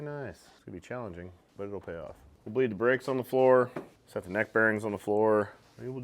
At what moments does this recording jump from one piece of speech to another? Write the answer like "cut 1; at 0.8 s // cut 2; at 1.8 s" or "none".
cut 1; at 2.3 s